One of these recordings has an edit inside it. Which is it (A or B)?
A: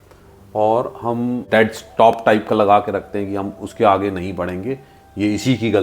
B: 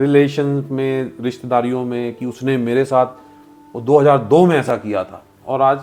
A